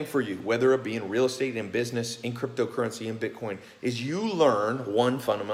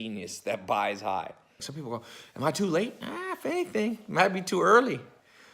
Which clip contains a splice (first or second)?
second